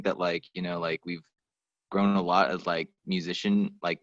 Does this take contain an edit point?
no; 0 cuts

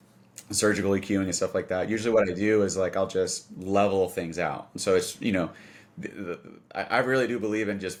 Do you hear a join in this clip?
no; 0 cuts

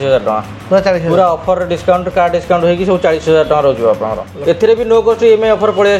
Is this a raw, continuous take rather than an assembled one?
no; 1 cut; at 4.3 s

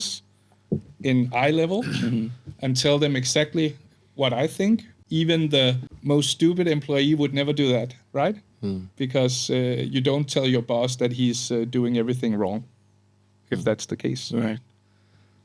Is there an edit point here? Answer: yes; 2 cuts; at 4.9 s, 5.9 s

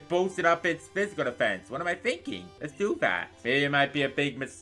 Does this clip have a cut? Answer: yes; 2 cuts; at 2.6 s, 3.3 s

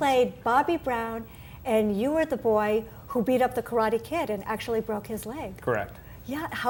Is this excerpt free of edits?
yes; 0 cuts

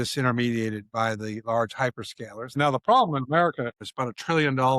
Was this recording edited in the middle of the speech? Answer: yes; 2 cuts; at 2.6 s, 3.9 s

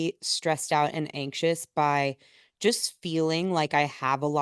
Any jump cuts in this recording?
no; 0 cuts

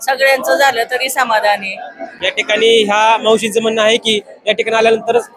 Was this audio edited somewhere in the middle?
no; 0 cuts

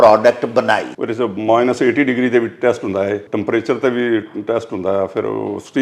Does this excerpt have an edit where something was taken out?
yes; 2 cuts; at 1.0 s, 3.3 s

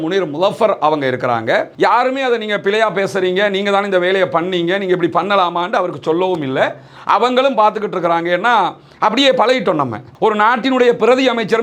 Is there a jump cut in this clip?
yes; 2 cuts; at 1.7 s, 10.0 s

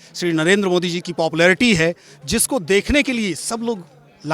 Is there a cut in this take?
no; 0 cuts

